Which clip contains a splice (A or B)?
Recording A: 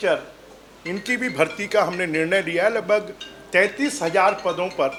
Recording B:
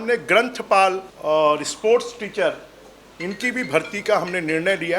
B